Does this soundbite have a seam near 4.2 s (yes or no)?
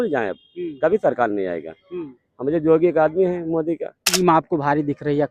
yes